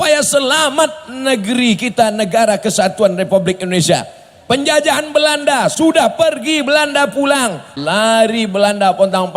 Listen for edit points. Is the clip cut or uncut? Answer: cut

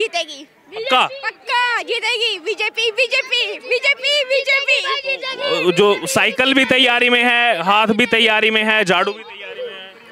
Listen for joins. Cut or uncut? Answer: uncut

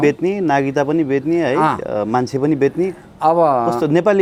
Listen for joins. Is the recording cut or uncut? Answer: uncut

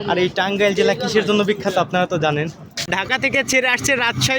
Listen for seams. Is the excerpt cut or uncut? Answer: cut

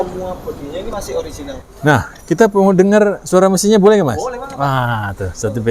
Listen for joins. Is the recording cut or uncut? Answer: cut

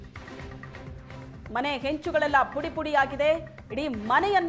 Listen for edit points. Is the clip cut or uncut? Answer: cut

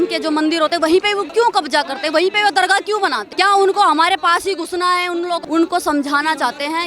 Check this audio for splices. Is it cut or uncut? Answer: cut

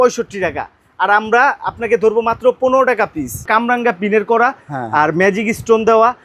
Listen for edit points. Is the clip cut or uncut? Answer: cut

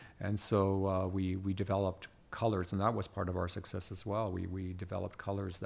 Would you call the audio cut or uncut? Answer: uncut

